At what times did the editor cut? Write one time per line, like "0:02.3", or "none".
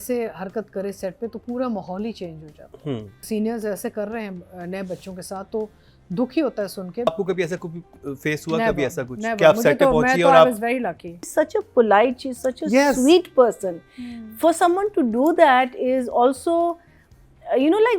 0:03.2
0:07.1
0:11.3